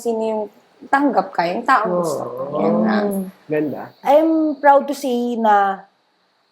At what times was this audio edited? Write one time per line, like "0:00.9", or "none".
0:03.8